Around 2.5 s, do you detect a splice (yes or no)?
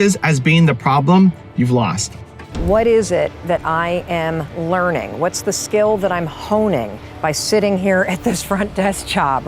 yes